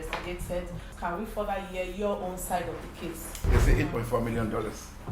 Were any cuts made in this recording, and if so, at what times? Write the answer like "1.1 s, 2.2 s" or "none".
0.9 s, 3.4 s